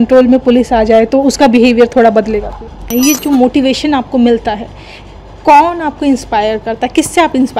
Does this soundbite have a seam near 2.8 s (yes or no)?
yes